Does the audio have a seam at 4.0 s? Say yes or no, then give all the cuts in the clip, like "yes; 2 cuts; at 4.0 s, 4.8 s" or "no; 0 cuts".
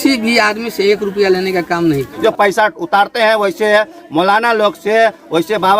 no; 1 cut; at 2.1 s